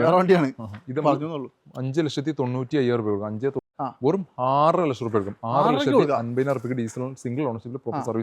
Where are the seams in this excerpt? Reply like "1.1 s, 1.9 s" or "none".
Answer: 3.7 s